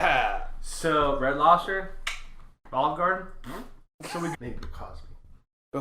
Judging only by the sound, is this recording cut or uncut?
cut